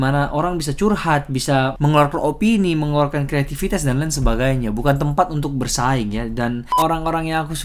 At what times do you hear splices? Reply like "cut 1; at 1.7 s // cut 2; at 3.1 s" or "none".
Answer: cut 1; at 6.7 s